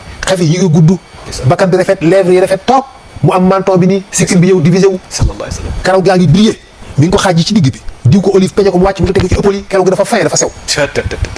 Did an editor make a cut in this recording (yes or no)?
no